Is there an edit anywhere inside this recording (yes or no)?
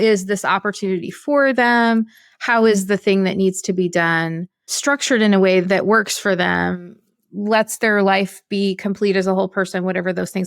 yes